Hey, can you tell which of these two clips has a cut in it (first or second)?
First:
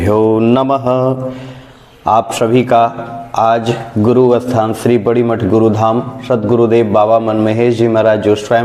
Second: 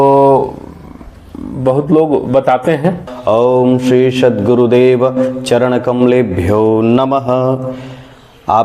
second